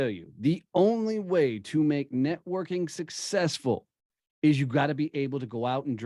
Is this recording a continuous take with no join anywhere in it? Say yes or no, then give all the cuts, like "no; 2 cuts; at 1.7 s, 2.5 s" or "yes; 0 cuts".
yes; 0 cuts